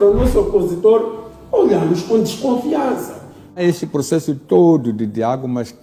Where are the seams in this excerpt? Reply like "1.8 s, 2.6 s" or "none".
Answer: 3.6 s